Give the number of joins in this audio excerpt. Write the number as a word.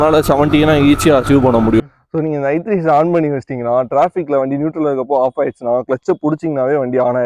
one